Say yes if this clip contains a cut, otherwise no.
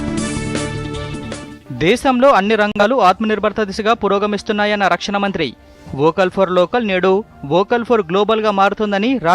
yes